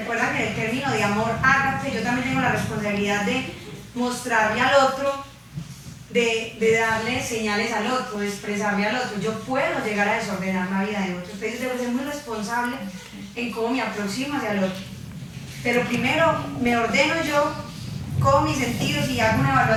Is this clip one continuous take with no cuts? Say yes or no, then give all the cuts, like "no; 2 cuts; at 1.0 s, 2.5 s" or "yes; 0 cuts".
yes; 0 cuts